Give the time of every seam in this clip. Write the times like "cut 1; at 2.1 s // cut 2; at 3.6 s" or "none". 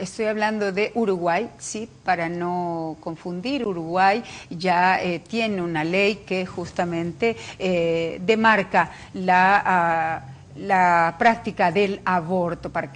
cut 1; at 1.7 s